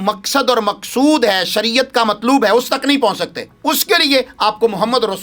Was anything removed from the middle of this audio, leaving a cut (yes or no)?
no